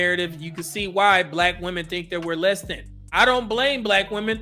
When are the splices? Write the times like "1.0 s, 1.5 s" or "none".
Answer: 3.1 s